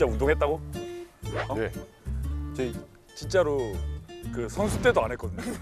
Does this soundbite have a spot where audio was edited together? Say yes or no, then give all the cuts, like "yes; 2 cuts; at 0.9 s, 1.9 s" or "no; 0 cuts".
no; 0 cuts